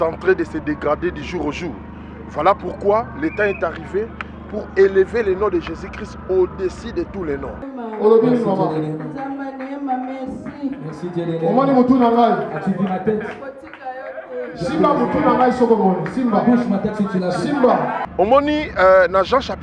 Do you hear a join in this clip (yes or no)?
yes